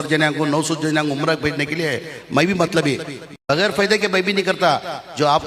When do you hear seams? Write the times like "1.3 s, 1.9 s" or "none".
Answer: 3.2 s